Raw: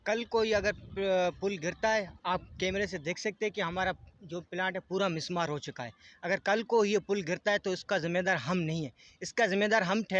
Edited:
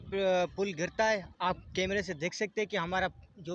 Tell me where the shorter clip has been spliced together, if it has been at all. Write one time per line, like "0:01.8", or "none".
none